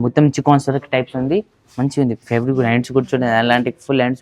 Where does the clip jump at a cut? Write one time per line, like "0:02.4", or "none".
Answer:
none